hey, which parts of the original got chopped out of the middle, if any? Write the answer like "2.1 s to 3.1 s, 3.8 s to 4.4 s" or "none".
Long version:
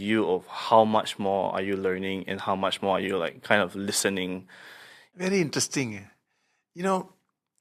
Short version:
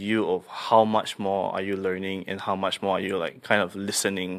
none

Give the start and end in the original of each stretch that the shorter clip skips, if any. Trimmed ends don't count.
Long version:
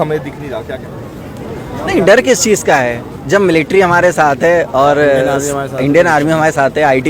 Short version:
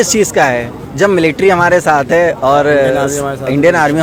none

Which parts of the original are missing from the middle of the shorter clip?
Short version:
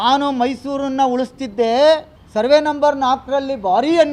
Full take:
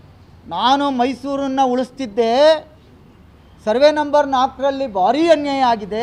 2.8 s to 3.5 s

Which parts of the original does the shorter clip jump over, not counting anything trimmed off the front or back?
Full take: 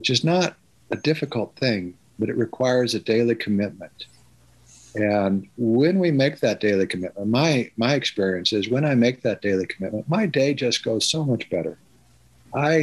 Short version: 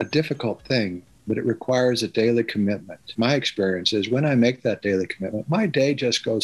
4.0 s to 7.7 s

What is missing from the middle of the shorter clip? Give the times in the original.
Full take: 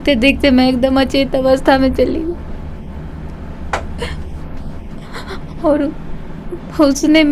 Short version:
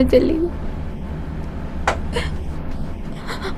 none

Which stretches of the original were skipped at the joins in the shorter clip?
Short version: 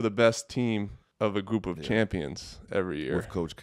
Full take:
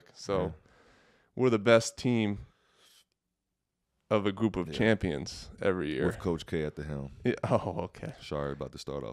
2.5 s to 3.9 s

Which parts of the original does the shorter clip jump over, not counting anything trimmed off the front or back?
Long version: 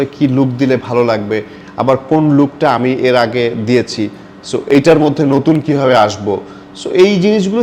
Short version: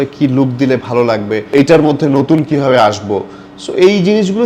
1.5 s to 4.6 s

